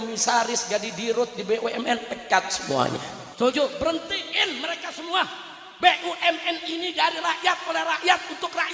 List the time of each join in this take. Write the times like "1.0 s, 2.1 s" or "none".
3.2 s